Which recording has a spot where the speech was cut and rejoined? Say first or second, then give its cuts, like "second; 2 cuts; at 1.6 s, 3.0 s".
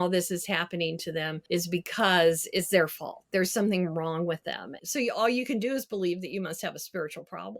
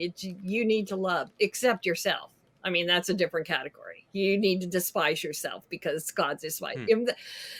first; 2 cuts; at 1.4 s, 4.8 s